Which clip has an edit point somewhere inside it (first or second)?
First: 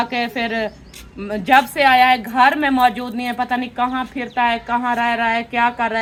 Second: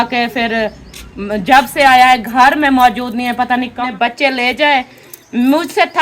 second